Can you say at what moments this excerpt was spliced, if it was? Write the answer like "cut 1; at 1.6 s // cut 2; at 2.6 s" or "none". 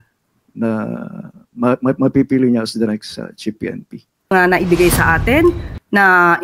cut 1; at 4.3 s